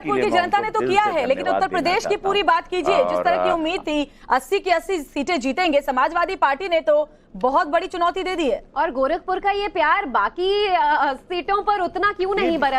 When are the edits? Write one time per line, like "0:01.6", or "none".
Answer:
0:11.2